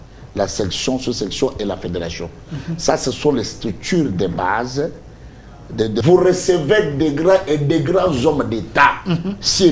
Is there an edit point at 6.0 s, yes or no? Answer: yes